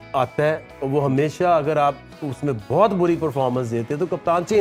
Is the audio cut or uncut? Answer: uncut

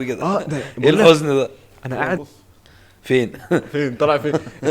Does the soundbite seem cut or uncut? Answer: cut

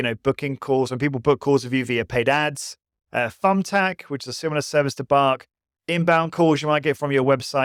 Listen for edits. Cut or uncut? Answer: uncut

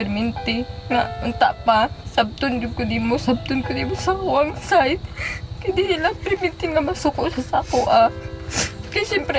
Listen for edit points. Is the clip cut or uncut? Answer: uncut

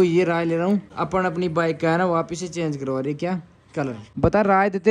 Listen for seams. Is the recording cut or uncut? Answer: cut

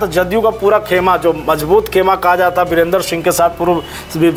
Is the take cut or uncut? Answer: uncut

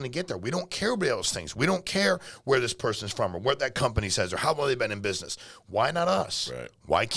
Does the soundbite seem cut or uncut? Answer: uncut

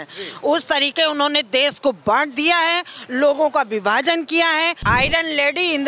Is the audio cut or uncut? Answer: cut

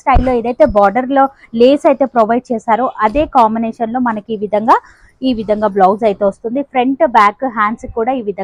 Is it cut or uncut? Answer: uncut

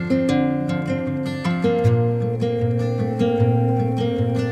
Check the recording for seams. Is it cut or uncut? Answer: uncut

